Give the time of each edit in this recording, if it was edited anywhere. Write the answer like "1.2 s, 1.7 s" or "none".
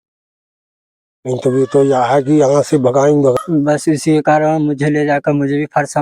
3.3 s